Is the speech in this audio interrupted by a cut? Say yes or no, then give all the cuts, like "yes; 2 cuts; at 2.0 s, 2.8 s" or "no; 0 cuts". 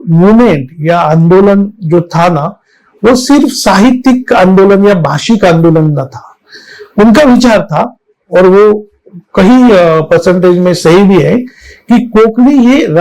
no; 0 cuts